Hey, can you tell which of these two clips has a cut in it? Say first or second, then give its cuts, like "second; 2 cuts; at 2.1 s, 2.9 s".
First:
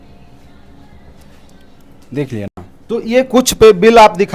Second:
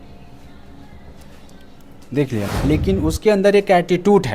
second; 1 cut; at 2.5 s